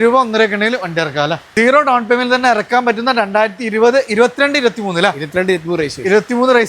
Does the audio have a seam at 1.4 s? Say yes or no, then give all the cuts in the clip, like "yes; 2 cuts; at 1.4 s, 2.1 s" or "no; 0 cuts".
yes; 1 cut; at 1.4 s